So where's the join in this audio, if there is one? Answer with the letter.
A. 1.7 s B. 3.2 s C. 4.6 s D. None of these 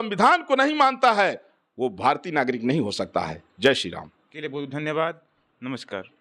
D